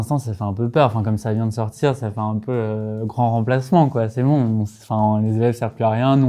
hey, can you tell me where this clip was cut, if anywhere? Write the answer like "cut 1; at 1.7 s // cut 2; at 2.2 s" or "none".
none